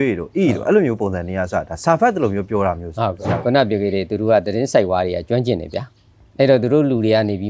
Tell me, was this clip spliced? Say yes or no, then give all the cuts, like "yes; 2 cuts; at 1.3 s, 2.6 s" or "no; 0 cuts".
yes; 1 cut; at 3.3 s